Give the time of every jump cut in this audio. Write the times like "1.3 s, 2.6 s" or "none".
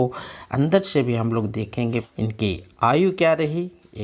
2.1 s